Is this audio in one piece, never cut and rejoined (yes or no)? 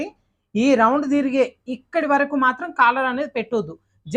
yes